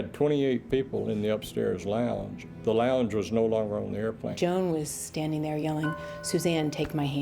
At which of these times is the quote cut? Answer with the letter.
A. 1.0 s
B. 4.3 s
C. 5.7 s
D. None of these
B